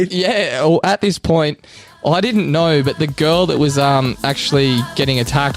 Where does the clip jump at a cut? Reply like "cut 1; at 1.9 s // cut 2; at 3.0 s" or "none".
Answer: none